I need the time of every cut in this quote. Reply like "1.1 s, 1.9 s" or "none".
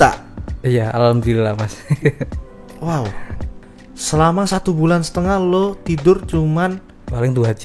3.6 s